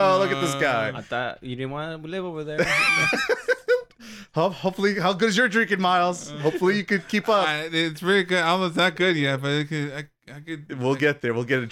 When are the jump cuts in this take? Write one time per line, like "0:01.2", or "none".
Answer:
none

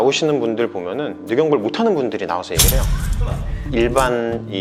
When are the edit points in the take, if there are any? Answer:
none

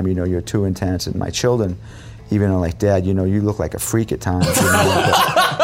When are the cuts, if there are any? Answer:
none

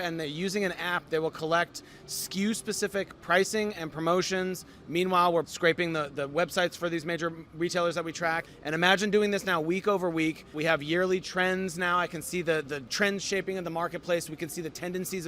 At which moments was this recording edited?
0:05.4
0:08.5
0:10.6
0:12.8

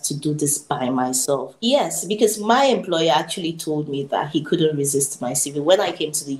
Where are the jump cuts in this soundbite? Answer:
0:01.5

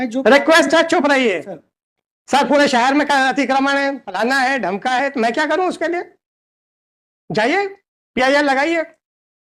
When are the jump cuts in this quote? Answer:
none

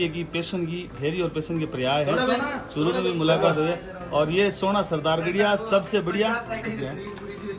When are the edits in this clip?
0:06.6

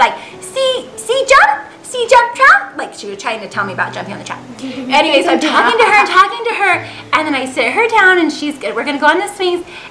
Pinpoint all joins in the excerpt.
none

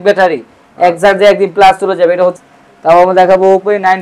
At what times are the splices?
0:02.3

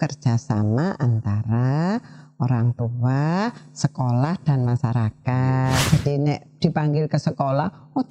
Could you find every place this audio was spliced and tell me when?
0:05.9

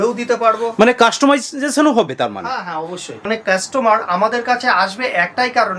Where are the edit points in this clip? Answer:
0:03.3

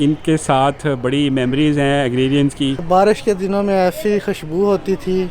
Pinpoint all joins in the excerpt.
0:02.8

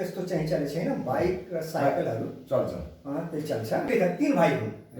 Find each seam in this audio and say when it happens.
0:03.9

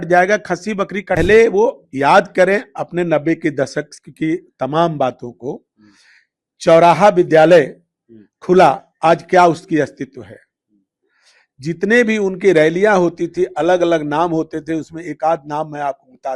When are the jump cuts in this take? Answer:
0:01.2

